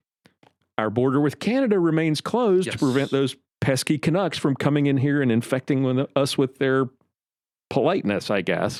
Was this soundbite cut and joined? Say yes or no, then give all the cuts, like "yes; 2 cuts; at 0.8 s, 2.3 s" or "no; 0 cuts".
no; 0 cuts